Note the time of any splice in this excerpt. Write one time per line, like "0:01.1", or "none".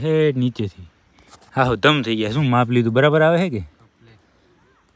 none